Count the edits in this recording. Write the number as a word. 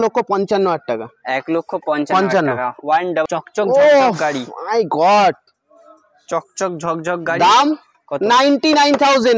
one